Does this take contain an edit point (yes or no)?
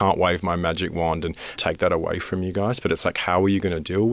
yes